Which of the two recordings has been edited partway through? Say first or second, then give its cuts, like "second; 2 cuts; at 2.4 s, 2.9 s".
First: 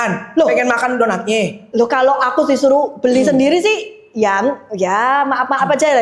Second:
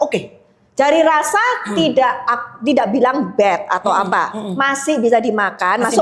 first; 1 cut; at 1.6 s